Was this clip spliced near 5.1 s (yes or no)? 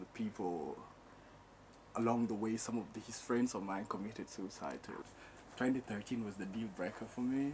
yes